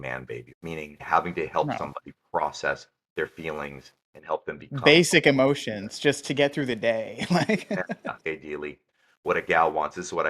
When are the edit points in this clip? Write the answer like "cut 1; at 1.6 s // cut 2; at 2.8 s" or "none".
cut 1; at 0.9 s // cut 2; at 8.3 s